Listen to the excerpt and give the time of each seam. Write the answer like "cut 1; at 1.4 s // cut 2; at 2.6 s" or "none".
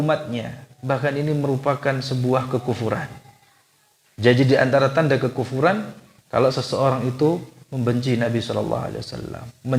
cut 1; at 6.1 s